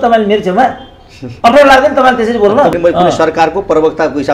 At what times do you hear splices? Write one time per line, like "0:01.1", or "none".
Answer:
0:02.7